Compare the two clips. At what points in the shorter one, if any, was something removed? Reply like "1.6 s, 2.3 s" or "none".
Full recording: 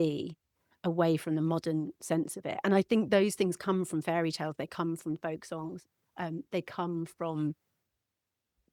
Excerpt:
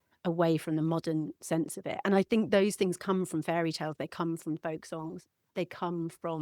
5.5 s